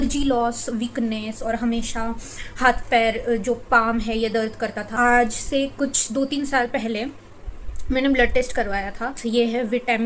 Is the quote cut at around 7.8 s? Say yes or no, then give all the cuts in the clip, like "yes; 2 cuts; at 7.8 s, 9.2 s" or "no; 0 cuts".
no; 2 cuts; at 4.8 s, 9.1 s